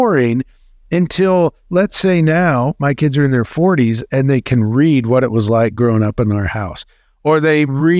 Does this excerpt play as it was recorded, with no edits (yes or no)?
yes